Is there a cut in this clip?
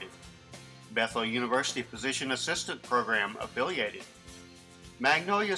no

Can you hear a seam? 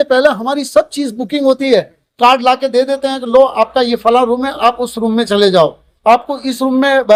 no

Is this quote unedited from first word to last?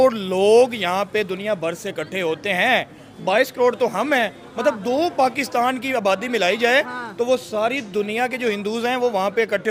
yes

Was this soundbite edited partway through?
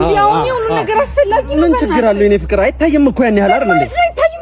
no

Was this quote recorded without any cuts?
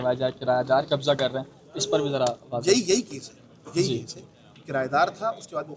yes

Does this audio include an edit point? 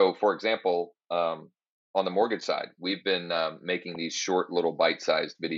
no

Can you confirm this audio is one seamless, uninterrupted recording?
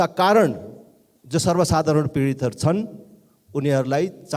yes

